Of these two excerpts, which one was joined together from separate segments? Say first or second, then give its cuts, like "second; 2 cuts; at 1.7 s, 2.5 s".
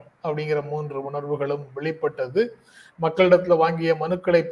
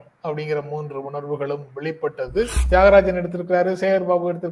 second; 1 cut; at 2.6 s